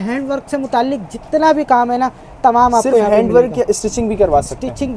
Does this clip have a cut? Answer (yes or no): no